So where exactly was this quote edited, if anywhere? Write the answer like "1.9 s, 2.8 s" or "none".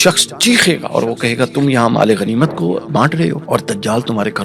3.4 s